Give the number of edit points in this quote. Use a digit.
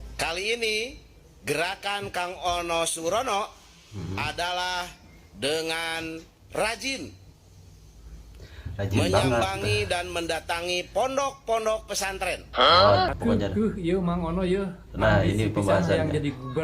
1